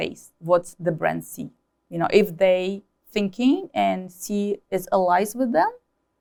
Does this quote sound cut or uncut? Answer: uncut